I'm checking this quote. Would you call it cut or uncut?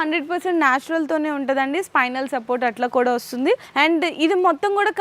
cut